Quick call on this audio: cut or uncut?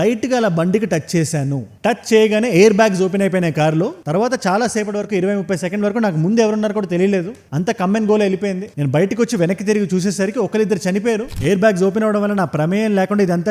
cut